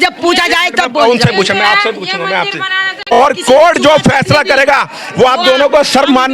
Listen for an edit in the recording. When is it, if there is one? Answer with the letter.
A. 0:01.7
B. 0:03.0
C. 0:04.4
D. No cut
B